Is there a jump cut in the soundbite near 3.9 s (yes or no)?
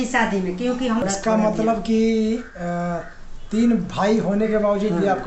no